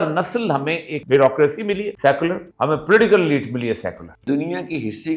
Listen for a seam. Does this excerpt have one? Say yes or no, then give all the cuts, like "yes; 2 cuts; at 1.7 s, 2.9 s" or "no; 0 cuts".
yes; 4 cuts; at 0.9 s, 1.9 s, 2.5 s, 4.2 s